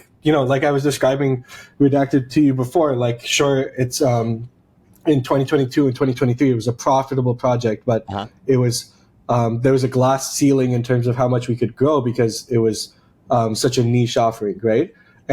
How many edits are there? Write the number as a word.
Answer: zero